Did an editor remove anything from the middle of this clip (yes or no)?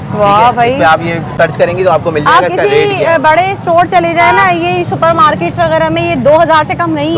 no